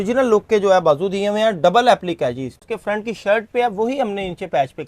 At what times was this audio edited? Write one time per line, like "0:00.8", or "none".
0:02.7